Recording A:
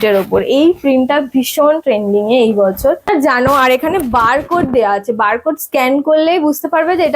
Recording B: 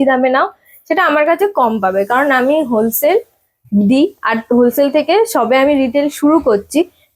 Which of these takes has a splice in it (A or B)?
A